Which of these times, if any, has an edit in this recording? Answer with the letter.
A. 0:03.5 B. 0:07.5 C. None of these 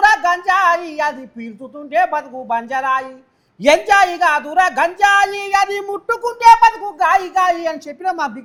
C